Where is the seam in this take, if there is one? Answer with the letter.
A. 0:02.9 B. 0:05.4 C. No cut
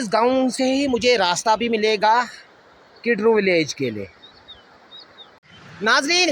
B